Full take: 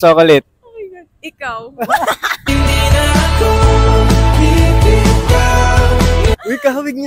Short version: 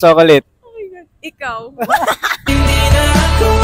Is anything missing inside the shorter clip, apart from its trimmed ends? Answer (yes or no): no